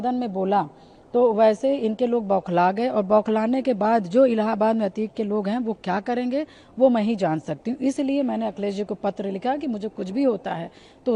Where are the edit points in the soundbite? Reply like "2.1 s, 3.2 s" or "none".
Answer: none